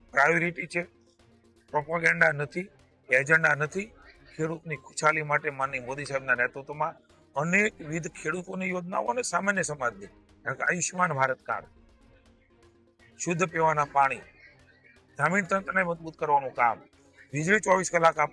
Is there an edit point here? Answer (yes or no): no